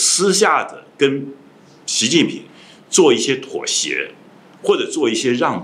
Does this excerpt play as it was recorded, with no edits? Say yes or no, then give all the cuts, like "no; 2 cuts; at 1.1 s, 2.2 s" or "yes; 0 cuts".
yes; 0 cuts